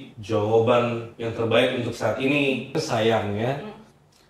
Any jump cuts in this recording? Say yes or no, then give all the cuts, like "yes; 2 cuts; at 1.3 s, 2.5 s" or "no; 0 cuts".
yes; 1 cut; at 2.7 s